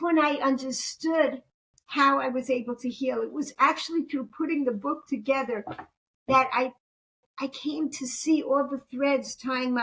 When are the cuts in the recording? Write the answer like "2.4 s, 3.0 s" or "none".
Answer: none